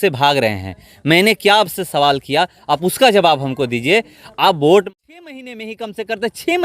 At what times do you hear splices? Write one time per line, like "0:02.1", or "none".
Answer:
0:04.9